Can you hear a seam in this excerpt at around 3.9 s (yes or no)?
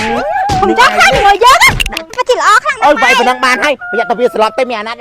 no